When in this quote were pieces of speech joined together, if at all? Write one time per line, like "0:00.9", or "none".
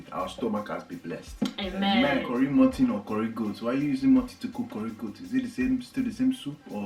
0:02.3